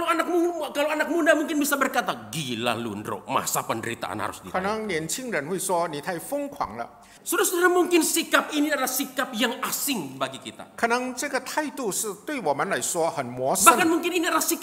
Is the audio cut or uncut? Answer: cut